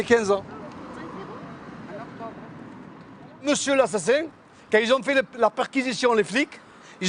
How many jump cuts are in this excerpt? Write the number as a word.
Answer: zero